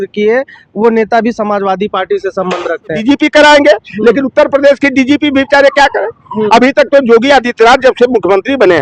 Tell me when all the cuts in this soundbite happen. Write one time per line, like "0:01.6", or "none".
0:03.0